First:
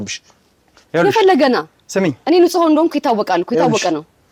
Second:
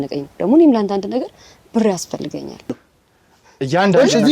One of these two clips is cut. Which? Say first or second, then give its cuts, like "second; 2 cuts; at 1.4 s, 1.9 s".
second; 1 cut; at 2.8 s